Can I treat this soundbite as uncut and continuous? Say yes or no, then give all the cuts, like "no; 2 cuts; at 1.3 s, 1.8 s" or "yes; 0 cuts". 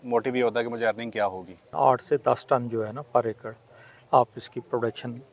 no; 1 cut; at 1.7 s